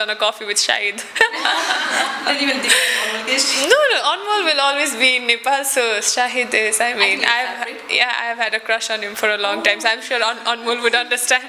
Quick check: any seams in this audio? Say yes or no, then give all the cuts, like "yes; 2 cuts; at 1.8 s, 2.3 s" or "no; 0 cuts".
no; 0 cuts